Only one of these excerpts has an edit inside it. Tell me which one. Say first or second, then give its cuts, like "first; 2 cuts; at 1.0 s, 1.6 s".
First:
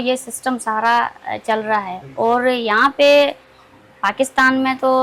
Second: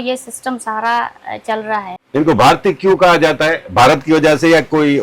second; 1 cut; at 2.0 s